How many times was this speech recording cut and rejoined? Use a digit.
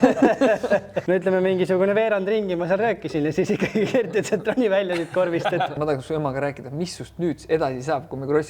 2